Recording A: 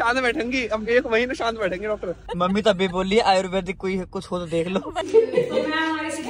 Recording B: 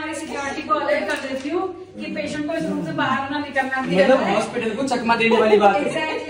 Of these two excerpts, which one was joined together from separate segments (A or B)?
A